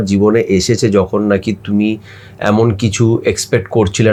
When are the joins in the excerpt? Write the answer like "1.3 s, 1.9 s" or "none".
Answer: none